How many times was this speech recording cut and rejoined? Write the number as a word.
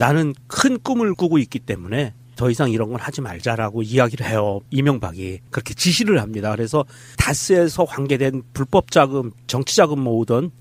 one